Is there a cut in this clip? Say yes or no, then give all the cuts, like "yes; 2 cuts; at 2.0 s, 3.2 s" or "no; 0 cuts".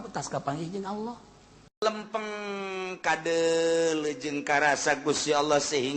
yes; 1 cut; at 1.8 s